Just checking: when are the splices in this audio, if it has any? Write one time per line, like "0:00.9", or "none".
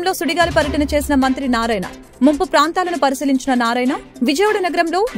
none